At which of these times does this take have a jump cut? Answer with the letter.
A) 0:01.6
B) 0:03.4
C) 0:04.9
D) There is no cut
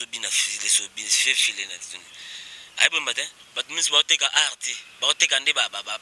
B